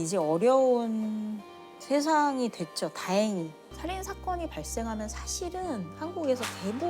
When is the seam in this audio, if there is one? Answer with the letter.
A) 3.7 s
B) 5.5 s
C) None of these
A